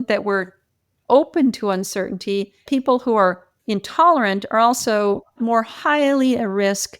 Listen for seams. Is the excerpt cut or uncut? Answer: cut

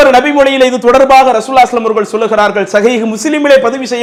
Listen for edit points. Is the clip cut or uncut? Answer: uncut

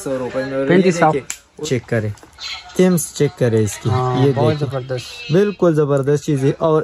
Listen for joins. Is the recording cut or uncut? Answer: cut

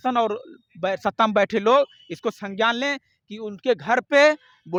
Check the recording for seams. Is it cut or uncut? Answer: uncut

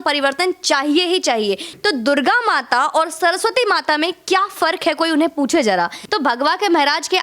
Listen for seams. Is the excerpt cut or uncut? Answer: cut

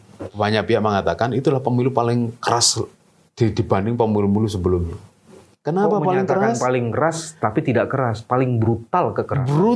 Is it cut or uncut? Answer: uncut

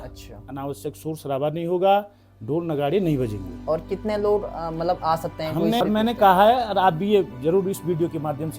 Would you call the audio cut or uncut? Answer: cut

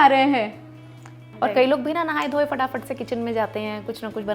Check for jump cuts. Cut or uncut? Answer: cut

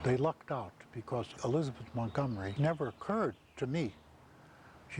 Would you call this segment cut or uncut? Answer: cut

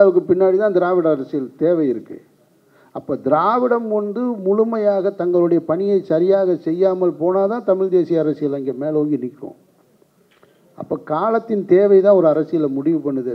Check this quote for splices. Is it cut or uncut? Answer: uncut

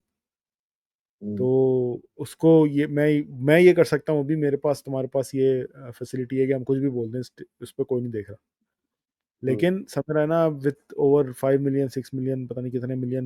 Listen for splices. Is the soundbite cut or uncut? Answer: uncut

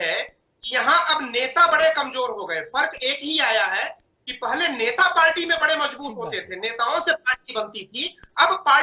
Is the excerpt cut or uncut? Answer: uncut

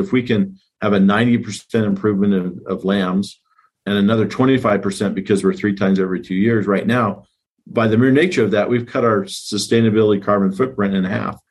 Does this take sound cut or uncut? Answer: uncut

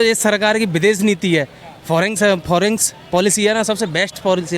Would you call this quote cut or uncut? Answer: uncut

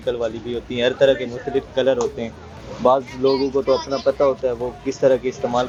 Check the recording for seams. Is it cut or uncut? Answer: uncut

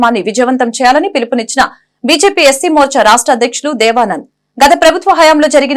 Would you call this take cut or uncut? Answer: uncut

